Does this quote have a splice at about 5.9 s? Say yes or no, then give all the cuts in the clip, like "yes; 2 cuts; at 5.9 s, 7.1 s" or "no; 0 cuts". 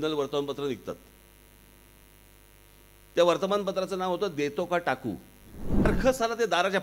yes; 1 cut; at 5.9 s